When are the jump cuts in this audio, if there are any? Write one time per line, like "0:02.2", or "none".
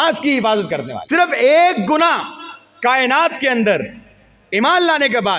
0:00.9